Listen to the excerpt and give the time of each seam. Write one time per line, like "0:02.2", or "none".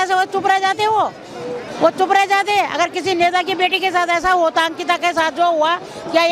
none